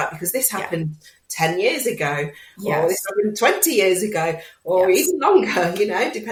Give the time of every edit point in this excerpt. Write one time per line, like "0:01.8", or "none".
none